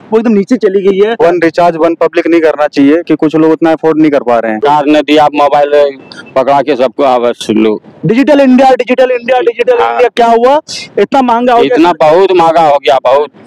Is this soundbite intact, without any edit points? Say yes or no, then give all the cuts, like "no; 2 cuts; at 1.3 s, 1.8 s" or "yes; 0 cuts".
no; 2 cuts; at 1.2 s, 4.6 s